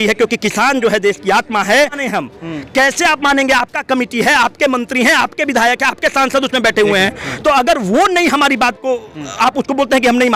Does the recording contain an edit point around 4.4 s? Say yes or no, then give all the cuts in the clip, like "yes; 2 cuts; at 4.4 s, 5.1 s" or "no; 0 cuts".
no; 1 cut; at 2.0 s